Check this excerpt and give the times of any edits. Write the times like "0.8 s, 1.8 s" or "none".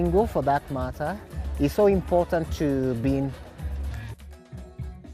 4.1 s